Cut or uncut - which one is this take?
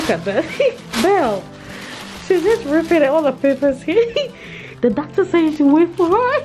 uncut